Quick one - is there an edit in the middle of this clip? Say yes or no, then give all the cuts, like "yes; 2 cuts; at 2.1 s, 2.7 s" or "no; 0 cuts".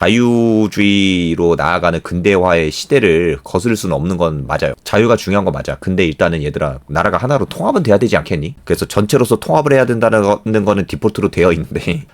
yes; 2 cuts; at 4.8 s, 8.6 s